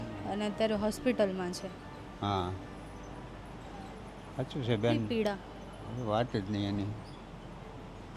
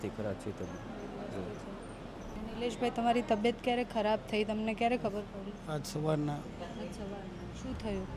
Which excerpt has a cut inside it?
second; 1 cut; at 2.3 s

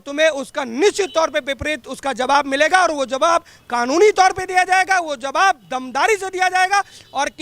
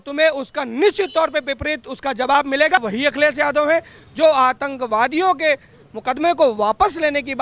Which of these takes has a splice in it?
second; 1 cut; at 2.8 s

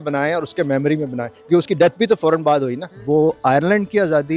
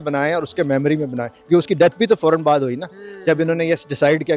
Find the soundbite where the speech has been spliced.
first; 1 cut; at 2.9 s

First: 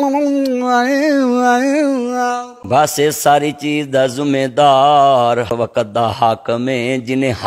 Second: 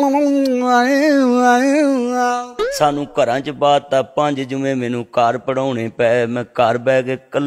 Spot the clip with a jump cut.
second; 1 cut; at 2.5 s

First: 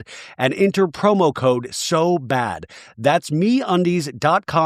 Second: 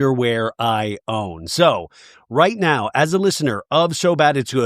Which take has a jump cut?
second; 1 cut; at 2.1 s

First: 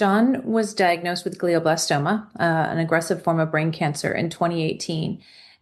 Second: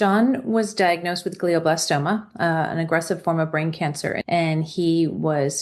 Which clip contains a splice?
second; 1 cut; at 4.2 s

